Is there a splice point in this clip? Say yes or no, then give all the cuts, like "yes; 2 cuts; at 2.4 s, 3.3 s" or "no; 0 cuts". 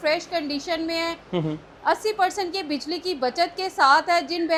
no; 0 cuts